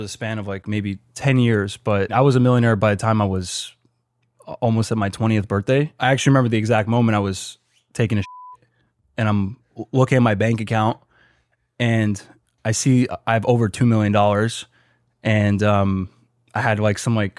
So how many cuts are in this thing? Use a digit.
2